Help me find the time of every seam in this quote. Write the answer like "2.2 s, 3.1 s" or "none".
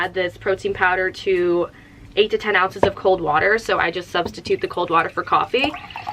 none